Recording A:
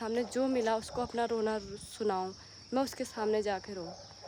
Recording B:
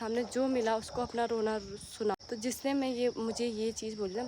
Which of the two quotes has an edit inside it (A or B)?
B